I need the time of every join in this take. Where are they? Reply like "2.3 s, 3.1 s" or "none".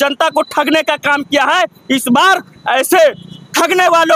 none

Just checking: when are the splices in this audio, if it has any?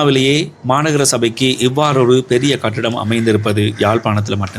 none

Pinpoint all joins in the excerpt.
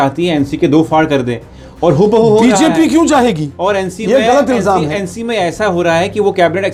none

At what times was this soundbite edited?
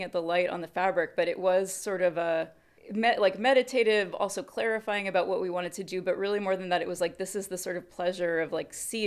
none

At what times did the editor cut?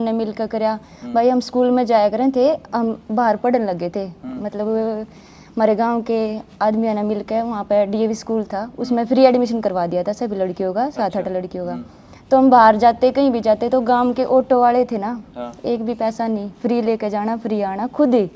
none

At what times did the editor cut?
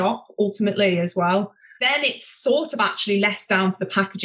1.8 s

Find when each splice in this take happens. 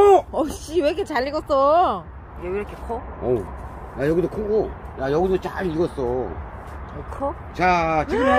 2.3 s

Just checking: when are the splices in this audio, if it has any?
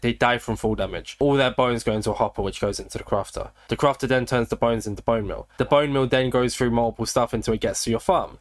none

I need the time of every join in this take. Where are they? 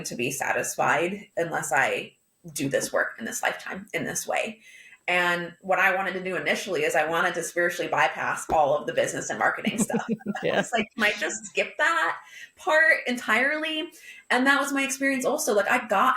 1.2 s

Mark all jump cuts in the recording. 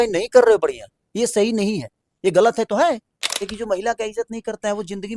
3.4 s

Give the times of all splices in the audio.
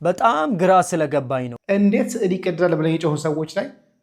1.5 s

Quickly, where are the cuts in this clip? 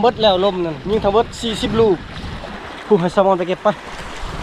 2.6 s

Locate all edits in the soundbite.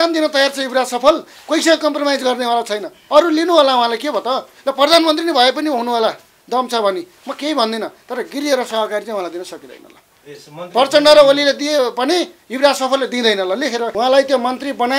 3.0 s, 13.9 s

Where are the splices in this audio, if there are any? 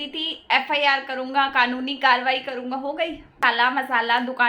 3.4 s

